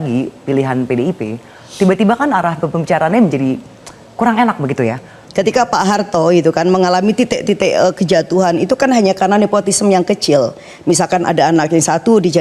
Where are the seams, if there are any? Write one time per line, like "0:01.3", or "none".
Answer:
0:05.2